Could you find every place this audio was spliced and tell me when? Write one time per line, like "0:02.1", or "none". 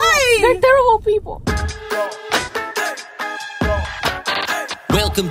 0:01.4